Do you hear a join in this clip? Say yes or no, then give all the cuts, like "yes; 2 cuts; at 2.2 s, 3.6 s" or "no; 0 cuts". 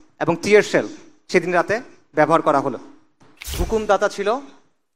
yes; 1 cut; at 3.6 s